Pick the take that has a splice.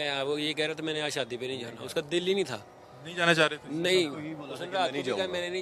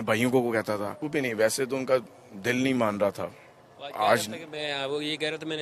second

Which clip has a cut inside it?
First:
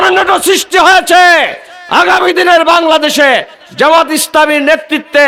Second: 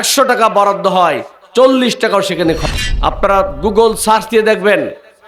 second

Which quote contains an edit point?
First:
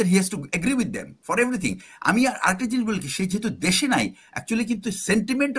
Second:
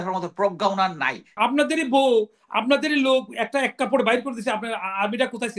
second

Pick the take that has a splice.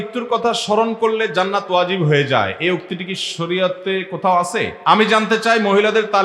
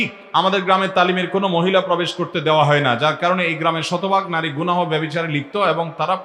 first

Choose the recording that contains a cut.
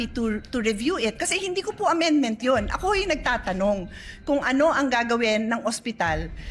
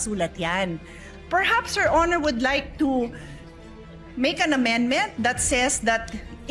second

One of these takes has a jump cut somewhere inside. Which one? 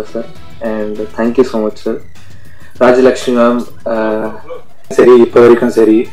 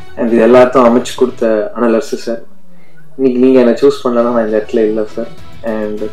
first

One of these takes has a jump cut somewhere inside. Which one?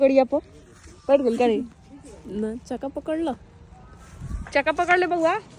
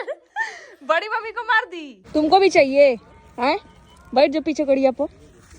second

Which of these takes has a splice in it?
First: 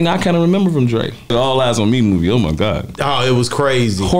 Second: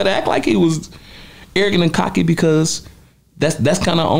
first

